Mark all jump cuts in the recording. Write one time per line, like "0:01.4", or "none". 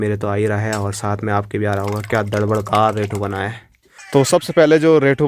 none